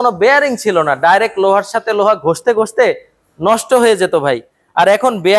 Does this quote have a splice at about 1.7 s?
no; 0 cuts

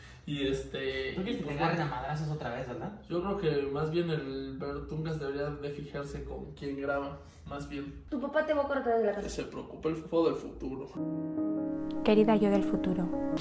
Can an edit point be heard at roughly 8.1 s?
yes; 1 cut; at 8.1 s

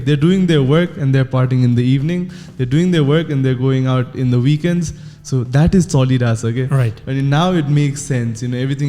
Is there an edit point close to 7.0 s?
no; 0 cuts

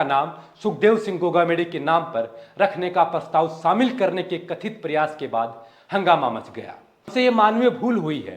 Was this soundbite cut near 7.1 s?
yes; 1 cut; at 7.1 s

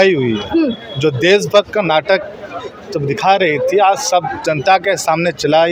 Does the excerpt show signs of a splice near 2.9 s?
no; 0 cuts

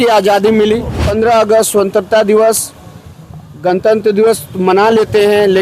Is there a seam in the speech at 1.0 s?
yes; 1 cut; at 1.0 s

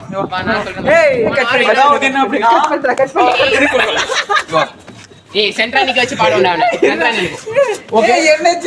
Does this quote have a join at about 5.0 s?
no; 2 cuts; at 1.3 s, 3.5 s

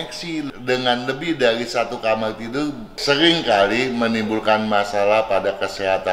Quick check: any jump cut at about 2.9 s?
yes; 1 cut; at 2.9 s

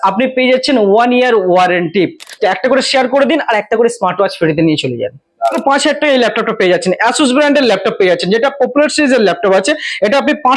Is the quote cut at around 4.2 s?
no; 2 cuts; at 2.3 s, 5.6 s

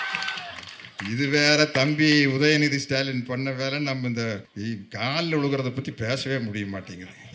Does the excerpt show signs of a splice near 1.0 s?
no; 1 cut; at 4.5 s

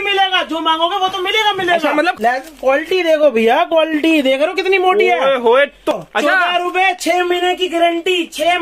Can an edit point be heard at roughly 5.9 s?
yes; 2 cuts; at 2.2 s, 5.9 s

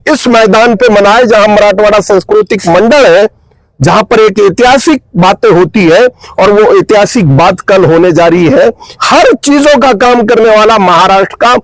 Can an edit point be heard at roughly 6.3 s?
no; 1 cut; at 8.9 s

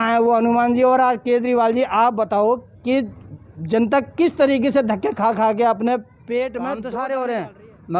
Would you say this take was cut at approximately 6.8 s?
yes; 1 cut; at 6.8 s

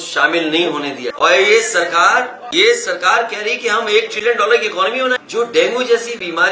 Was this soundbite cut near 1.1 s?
yes; 3 cuts; at 1.1 s, 2.4 s, 5.2 s

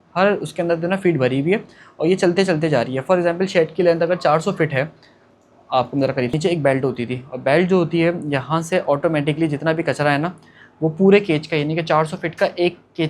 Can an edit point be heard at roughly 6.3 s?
yes; 1 cut; at 6.3 s

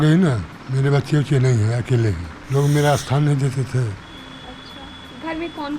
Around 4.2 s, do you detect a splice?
no; 1 cut; at 2.3 s

